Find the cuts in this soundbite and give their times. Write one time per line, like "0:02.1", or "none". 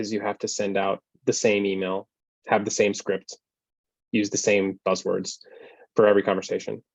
none